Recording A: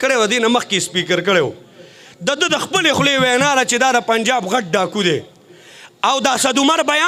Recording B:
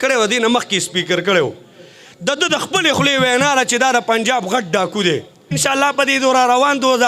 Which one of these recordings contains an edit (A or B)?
B